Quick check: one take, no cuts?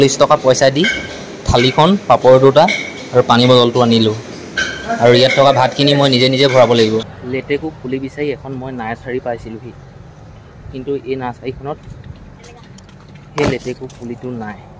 no; 1 cut; at 7.2 s

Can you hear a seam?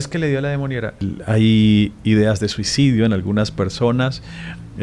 yes; 1 cut; at 1.0 s

